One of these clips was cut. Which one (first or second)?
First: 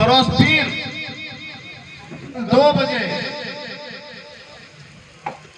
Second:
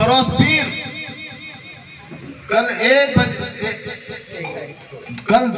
first